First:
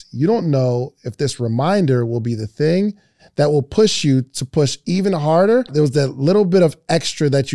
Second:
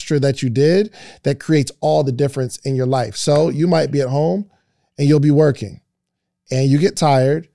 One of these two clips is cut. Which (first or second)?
first